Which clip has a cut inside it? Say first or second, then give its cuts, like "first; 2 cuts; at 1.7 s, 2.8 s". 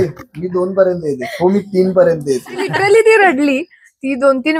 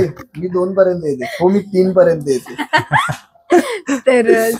first; 1 cut; at 2.7 s